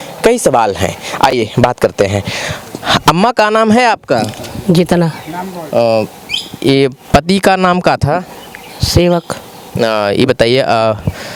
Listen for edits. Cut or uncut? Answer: uncut